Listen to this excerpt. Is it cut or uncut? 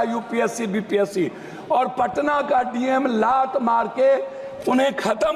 uncut